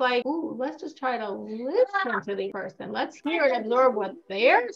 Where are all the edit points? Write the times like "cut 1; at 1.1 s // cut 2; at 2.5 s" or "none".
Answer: cut 1; at 2.6 s